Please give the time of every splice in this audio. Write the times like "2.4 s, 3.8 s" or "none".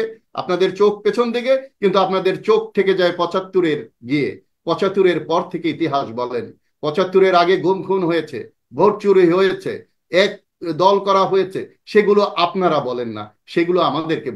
none